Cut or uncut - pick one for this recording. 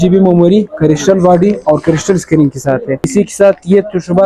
cut